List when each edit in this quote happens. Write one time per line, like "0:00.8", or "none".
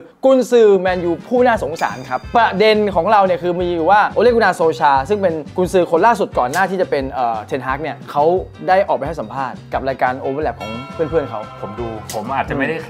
none